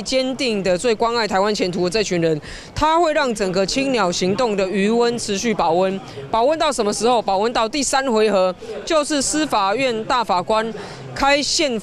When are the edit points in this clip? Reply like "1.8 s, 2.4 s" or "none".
none